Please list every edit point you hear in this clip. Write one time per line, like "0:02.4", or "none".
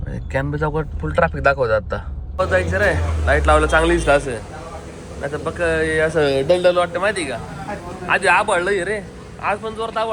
0:02.2